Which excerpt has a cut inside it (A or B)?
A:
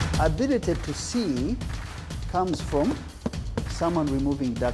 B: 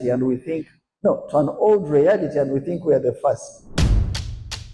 B